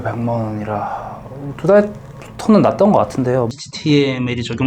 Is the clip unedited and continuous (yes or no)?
no